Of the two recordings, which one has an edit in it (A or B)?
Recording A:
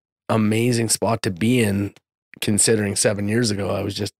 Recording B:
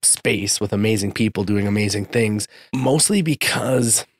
B